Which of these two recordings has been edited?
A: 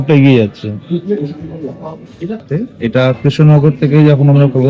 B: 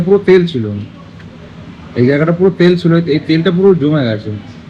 A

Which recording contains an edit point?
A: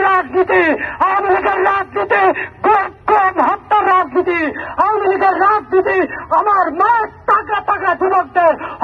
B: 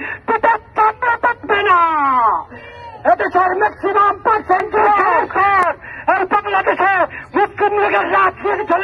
B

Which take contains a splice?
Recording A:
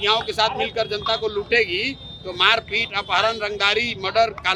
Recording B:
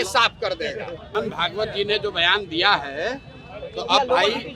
B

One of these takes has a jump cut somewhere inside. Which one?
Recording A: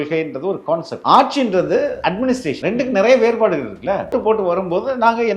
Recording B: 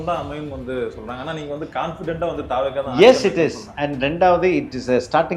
A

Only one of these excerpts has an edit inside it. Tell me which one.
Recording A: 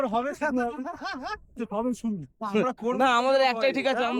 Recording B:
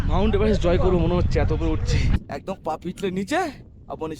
B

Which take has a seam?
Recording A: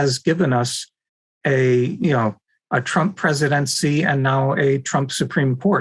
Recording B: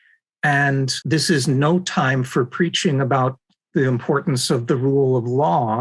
B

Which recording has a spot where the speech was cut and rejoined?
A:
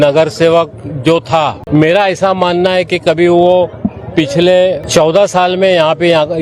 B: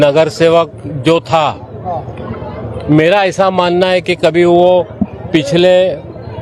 A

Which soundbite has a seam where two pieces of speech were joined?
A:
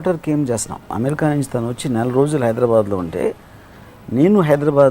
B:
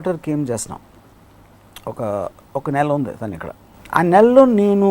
A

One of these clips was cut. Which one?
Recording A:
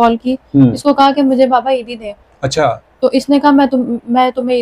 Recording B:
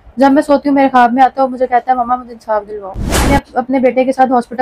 B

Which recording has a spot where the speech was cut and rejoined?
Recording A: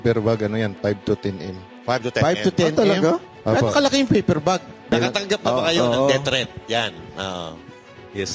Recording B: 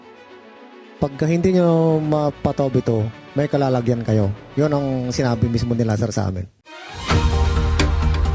A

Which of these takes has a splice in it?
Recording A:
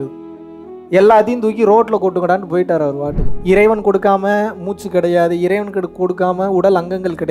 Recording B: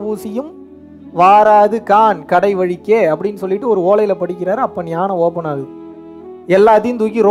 A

